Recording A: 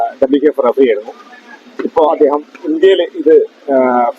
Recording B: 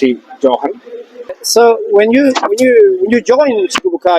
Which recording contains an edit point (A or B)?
B